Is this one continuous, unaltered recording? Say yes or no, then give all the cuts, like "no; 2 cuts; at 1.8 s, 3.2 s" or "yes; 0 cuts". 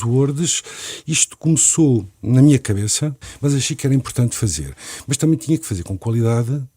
no; 1 cut; at 3.3 s